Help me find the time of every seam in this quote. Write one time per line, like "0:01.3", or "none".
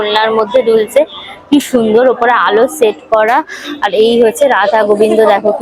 none